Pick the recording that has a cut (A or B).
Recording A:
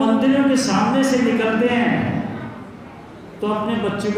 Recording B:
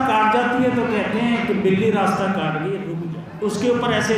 B